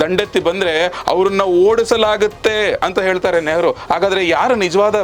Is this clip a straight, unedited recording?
yes; 0 cuts

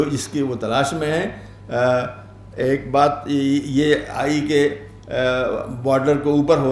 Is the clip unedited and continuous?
yes; 0 cuts

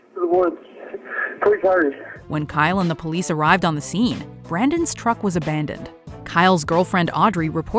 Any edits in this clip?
no; 0 cuts

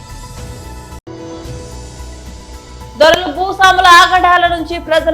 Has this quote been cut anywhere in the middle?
yes; 2 cuts; at 1.0 s, 2.9 s

